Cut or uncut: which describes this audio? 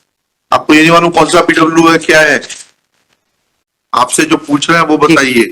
cut